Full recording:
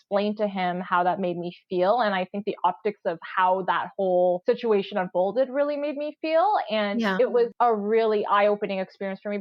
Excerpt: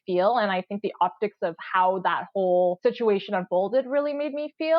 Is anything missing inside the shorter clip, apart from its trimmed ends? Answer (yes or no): no